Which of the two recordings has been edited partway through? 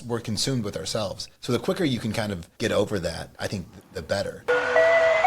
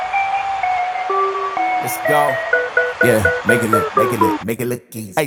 first; 4 cuts; at 1.3 s, 2.4 s, 3.3 s, 4.4 s

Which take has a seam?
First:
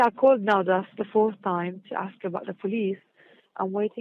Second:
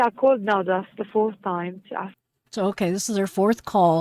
first; 1 cut; at 2.1 s

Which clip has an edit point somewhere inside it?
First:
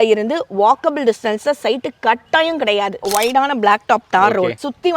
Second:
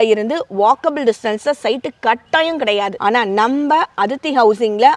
first; 1 cut; at 3.0 s

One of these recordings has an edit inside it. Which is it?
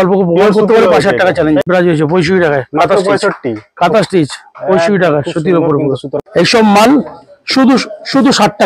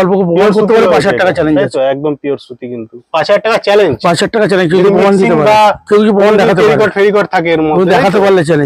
first; 2 cuts; at 1.6 s, 6.1 s

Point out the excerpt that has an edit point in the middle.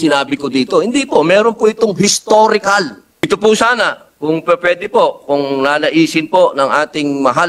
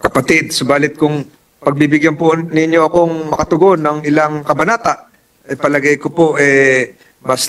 first; 1 cut; at 3.3 s

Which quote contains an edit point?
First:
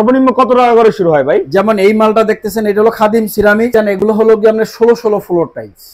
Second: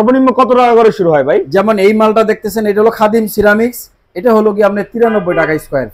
first; 1 cut; at 3.7 s

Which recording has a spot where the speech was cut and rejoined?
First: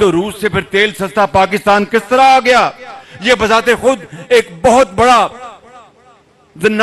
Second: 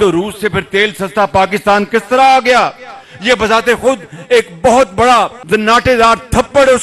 second; 1 cut; at 5.4 s

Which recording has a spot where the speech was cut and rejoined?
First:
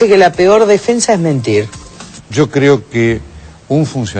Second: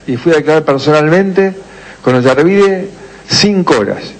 first; 1 cut; at 2.3 s

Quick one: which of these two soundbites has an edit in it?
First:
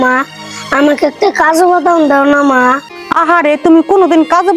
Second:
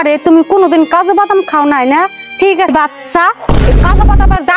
second; 1 cut; at 2.7 s

